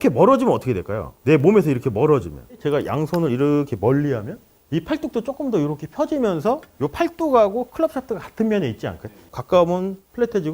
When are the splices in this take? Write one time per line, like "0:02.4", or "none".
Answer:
0:09.3